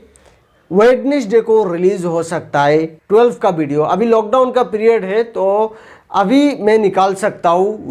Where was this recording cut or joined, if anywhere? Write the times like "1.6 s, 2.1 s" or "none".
3.0 s

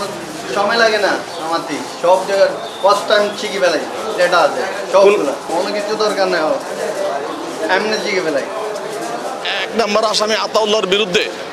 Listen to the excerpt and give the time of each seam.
none

